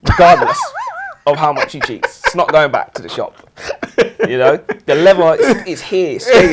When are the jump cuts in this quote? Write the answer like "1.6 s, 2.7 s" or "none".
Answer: none